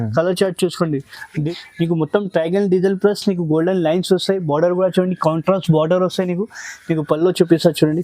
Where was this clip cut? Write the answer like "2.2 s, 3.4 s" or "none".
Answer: 1.5 s